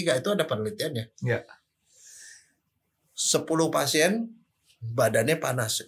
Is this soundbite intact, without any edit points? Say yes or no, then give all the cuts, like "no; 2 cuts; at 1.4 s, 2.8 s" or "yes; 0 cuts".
yes; 0 cuts